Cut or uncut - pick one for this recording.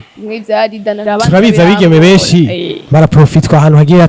cut